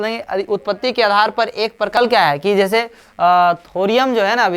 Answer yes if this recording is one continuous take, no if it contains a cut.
no